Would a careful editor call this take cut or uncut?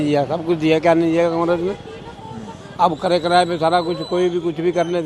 uncut